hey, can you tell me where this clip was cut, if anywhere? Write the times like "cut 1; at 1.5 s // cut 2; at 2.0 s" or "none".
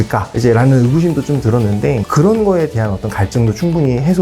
cut 1; at 2.1 s